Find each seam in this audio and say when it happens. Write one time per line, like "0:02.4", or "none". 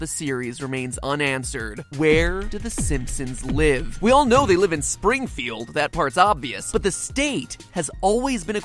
0:06.5